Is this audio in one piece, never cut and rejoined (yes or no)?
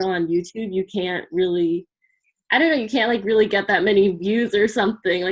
yes